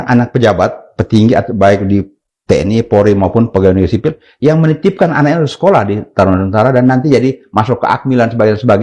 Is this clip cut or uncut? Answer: uncut